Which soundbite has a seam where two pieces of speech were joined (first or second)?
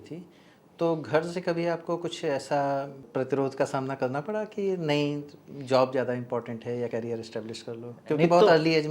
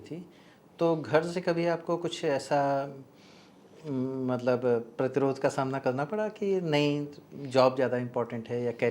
first